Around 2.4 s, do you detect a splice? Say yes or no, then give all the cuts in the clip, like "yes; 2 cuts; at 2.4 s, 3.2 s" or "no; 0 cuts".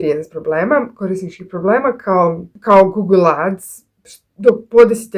no; 0 cuts